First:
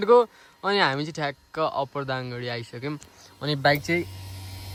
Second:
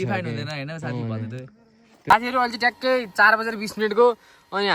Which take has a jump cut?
second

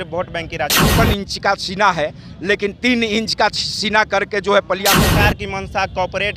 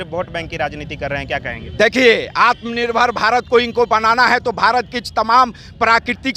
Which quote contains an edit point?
first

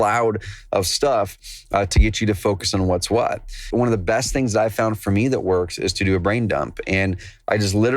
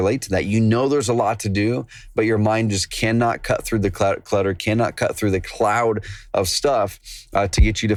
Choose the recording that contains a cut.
first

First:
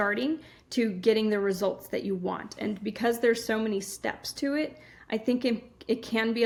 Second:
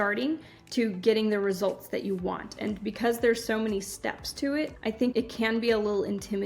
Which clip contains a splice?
second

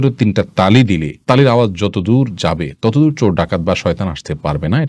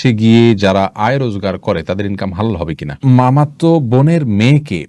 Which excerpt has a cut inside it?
second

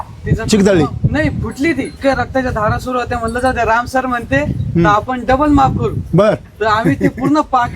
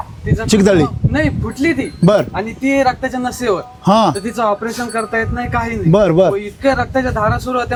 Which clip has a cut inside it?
first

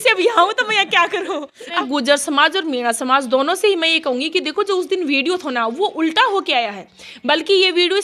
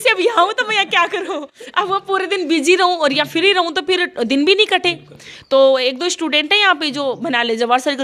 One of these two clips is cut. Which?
first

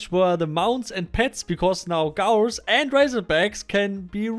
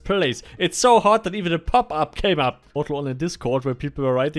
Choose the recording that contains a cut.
second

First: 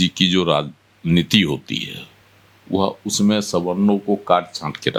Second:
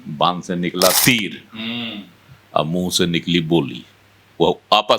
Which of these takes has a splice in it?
second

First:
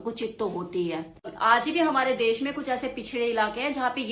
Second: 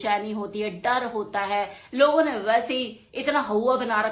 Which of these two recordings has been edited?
first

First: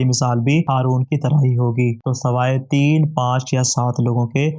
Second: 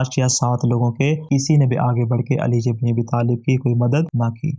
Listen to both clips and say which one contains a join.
first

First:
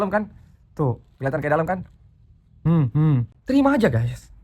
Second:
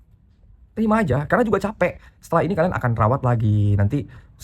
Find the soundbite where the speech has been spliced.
first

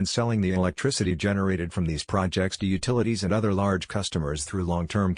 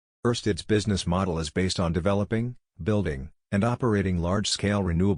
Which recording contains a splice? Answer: second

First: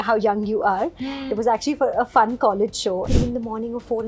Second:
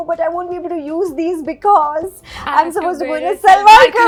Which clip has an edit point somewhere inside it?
first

